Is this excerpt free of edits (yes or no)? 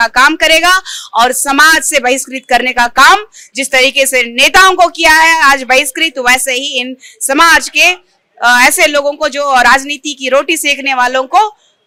yes